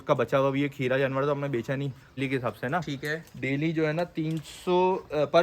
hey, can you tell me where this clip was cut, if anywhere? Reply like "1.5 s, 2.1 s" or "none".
2.2 s